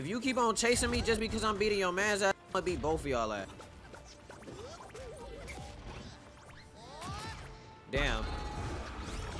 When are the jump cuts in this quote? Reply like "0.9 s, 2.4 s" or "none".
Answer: none